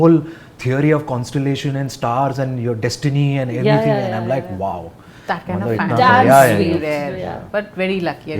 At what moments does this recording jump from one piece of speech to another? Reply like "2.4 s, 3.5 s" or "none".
none